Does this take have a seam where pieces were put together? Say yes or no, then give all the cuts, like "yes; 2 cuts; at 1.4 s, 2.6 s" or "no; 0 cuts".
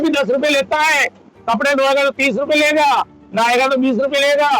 no; 0 cuts